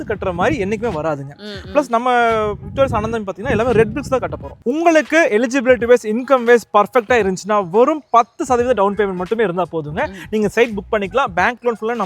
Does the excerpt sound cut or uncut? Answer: cut